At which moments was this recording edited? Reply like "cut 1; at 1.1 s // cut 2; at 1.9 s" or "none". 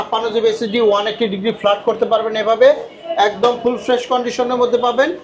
none